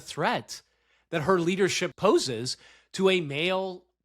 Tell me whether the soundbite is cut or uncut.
cut